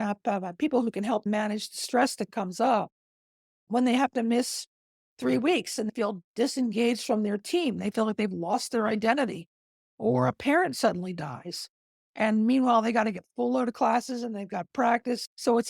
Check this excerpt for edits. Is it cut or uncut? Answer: uncut